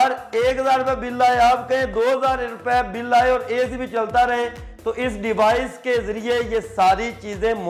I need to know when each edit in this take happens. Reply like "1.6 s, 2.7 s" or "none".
none